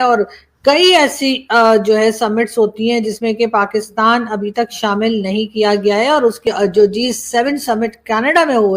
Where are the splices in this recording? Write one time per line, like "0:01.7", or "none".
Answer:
0:06.4

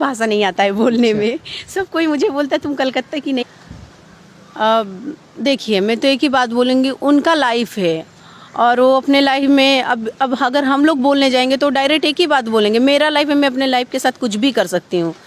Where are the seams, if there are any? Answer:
0:03.4

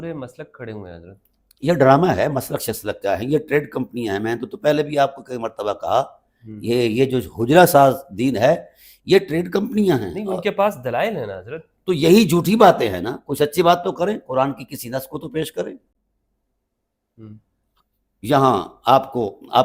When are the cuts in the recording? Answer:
none

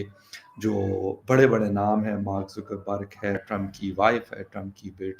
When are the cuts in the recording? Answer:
0:03.4

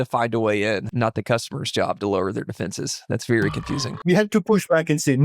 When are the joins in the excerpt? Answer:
0:00.9
0:03.9

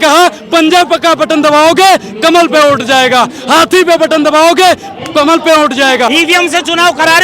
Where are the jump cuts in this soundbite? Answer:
0:06.1

